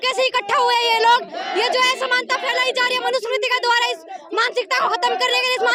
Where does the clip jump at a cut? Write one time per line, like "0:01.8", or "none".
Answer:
none